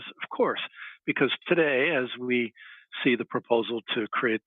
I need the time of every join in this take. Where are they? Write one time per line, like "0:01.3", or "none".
none